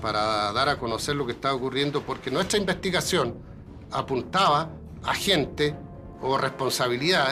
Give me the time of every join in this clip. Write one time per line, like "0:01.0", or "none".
none